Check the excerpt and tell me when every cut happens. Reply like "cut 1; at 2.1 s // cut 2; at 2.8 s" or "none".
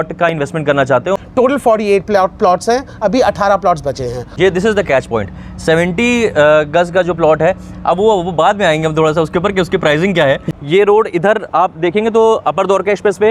cut 1; at 1.1 s // cut 2; at 4.3 s // cut 3; at 10.5 s